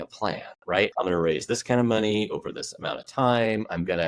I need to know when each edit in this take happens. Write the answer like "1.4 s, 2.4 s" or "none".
0.9 s